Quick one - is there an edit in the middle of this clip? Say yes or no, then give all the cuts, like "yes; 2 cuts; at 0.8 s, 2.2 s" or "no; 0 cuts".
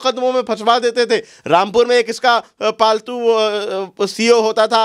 no; 0 cuts